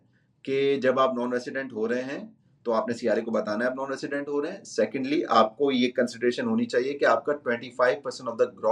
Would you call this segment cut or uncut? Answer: uncut